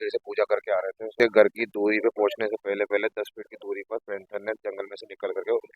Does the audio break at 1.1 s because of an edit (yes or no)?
yes